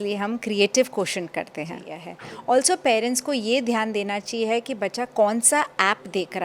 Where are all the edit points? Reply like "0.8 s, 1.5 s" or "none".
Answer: 2.2 s